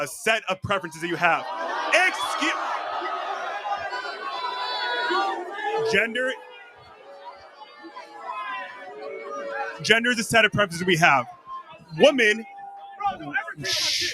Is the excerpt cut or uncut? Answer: cut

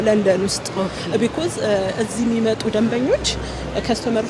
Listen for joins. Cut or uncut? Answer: uncut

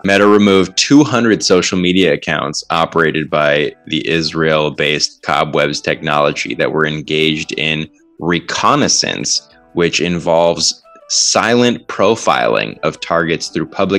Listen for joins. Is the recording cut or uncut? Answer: uncut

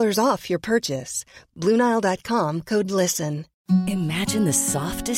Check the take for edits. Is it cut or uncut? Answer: cut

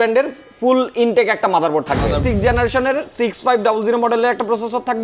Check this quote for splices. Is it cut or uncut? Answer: cut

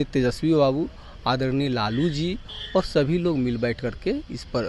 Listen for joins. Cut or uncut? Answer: uncut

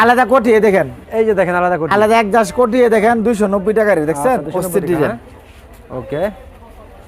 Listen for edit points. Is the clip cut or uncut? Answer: uncut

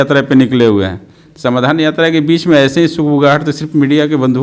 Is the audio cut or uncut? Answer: uncut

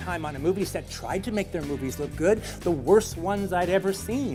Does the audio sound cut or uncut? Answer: uncut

